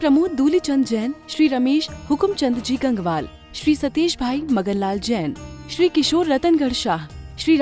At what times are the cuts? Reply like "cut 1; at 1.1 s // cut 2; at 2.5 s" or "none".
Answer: none